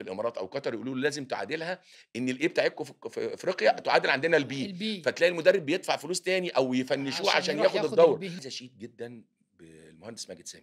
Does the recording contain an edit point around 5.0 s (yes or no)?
no